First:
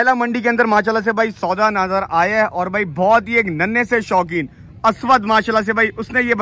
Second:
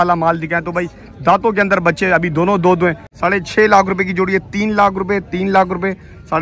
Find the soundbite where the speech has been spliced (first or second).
second